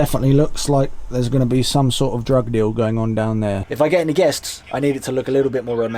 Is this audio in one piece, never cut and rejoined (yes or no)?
no